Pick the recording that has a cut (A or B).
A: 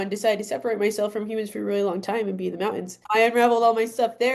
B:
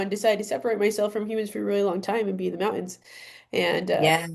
A